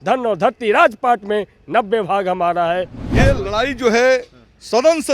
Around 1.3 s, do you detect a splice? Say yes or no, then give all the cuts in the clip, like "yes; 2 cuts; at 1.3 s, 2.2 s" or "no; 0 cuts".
no; 1 cut; at 3.0 s